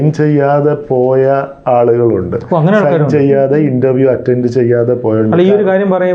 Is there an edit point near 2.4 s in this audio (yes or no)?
no